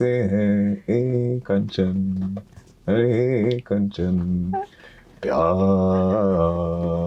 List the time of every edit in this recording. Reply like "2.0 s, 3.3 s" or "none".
none

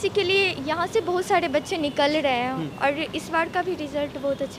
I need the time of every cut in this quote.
none

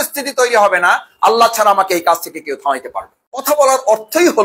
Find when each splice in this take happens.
3.4 s

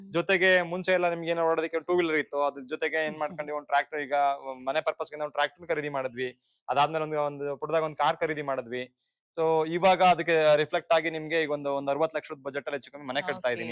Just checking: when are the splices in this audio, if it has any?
none

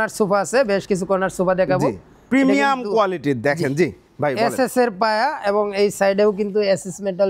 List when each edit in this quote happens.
none

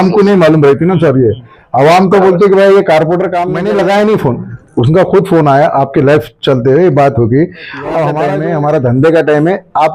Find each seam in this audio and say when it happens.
3.4 s, 8.3 s

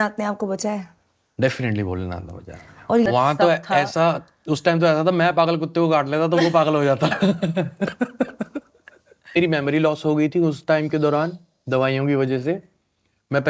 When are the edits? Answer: 3.1 s, 9.4 s

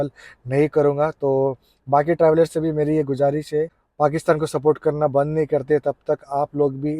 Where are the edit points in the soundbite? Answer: 3.8 s

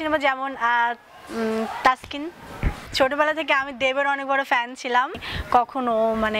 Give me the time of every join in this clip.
2.9 s, 5.2 s

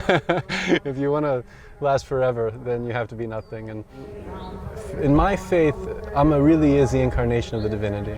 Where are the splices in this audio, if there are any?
4.2 s

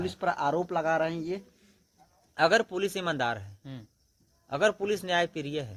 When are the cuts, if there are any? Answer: none

